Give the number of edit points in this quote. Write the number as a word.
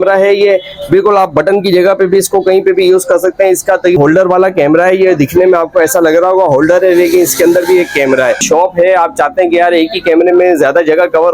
two